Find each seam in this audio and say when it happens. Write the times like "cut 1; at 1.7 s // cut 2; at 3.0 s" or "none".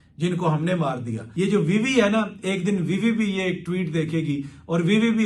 cut 1; at 1.2 s